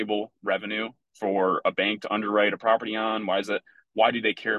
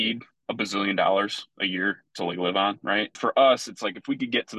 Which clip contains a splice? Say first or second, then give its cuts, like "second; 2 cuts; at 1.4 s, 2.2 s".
second; 1 cut; at 3.2 s